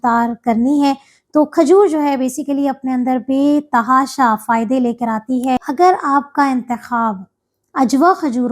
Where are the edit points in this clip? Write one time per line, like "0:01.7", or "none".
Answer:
0:05.7